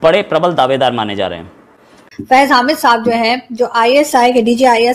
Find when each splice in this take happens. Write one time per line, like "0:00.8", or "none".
0:02.0

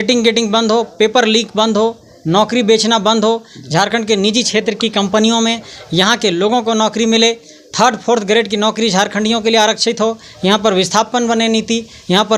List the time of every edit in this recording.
none

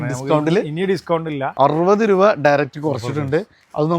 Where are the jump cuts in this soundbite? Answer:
0:01.5

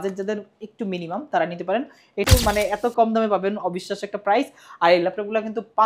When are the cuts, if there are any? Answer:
0:02.2

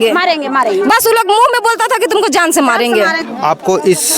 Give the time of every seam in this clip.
0:03.2

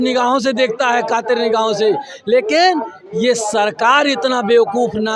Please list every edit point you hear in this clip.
none

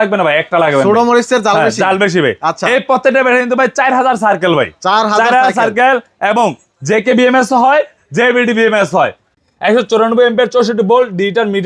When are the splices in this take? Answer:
0:09.3

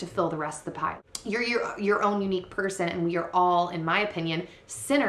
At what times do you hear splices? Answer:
0:01.0

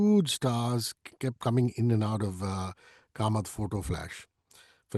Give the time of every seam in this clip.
none

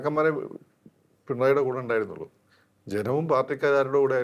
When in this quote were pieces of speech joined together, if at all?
none

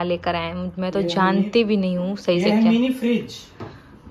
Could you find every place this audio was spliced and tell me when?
none

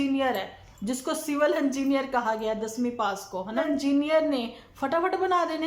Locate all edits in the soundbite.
0:03.6

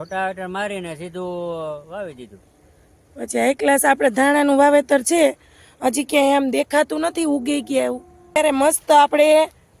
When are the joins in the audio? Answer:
0:08.4

